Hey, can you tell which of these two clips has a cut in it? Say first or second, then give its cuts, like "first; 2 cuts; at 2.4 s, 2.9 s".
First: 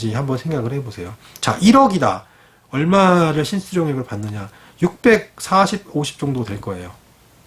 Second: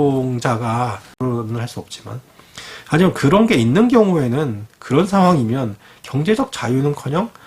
second; 1 cut; at 1.2 s